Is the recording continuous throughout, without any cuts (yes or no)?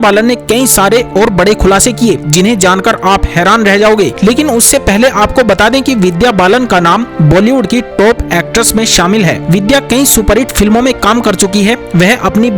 yes